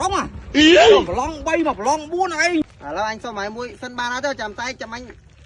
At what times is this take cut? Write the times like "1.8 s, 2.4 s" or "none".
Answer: 2.6 s

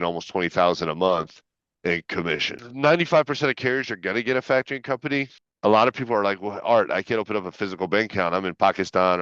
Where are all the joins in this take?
2.6 s, 5.4 s

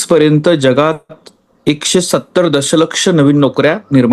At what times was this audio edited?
none

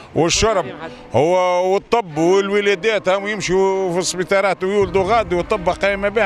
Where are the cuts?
none

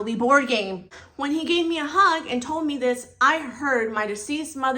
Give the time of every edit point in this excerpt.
1.0 s

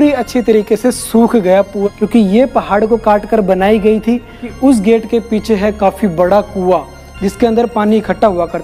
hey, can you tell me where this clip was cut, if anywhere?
1.9 s, 4.5 s

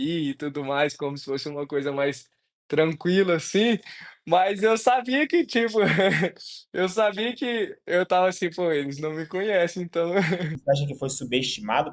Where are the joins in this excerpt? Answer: 10.5 s

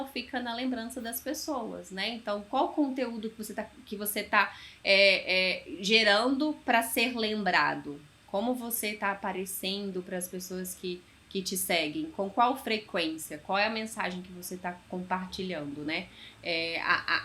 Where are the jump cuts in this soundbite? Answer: none

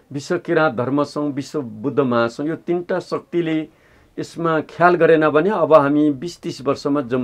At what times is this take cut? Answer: none

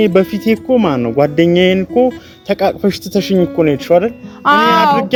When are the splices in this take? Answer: none

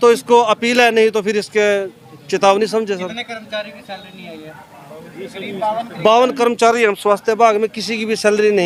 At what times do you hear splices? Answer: none

